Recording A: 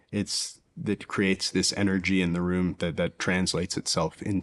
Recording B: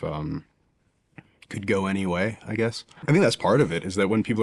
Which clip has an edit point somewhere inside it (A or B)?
B